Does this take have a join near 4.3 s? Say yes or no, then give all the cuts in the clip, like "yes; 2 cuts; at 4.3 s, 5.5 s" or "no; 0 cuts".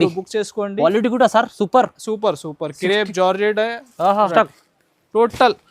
yes; 1 cut; at 4.3 s